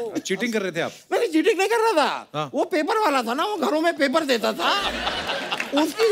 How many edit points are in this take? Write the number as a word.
zero